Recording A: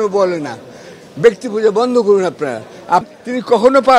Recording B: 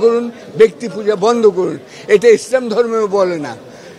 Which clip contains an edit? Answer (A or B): A